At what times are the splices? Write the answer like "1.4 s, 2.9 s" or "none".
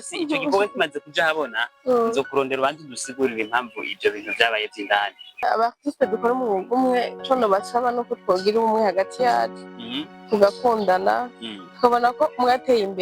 5.4 s

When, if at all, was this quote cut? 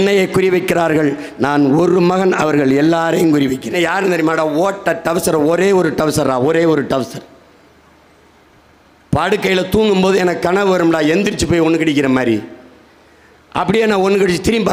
3.8 s

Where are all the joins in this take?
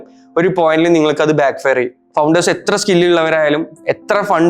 2.0 s

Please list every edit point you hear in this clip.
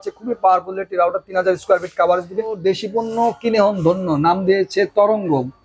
2.6 s

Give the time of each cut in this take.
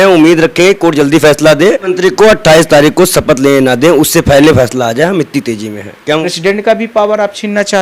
1.9 s, 6.3 s

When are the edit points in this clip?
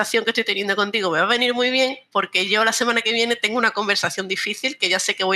none

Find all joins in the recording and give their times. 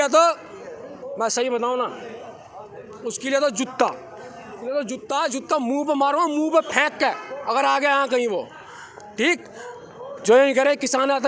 none

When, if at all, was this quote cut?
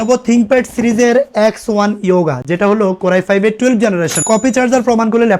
4.2 s

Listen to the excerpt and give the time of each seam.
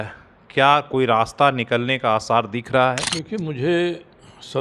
3.1 s

